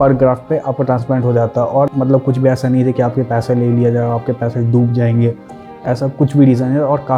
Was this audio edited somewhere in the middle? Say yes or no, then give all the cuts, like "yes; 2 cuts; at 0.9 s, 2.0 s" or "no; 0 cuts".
yes; 1 cut; at 1.9 s